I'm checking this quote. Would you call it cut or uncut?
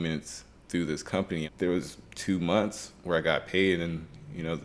cut